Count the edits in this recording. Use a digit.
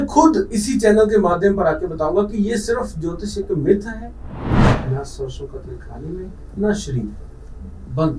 1